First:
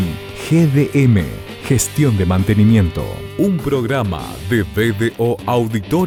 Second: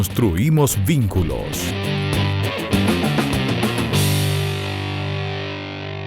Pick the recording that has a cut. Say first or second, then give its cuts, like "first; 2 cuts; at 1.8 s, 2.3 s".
second; 1 cut; at 1.7 s